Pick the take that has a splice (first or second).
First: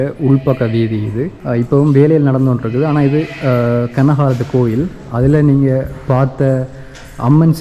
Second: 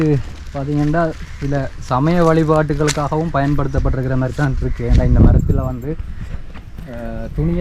first